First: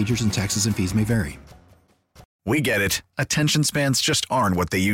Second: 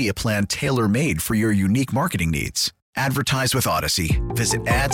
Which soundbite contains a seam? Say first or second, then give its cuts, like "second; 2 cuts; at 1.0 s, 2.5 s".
first; 1 cut; at 2.3 s